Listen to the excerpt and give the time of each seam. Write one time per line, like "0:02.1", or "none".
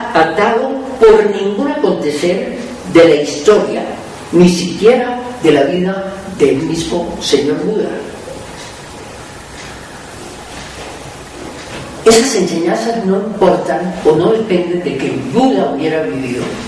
0:07.4